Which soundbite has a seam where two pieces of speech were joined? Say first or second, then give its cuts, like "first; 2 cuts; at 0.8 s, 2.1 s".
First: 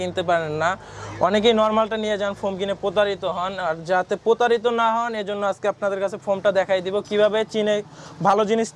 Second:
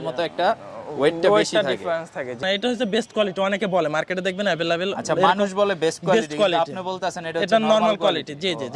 second; 1 cut; at 2.4 s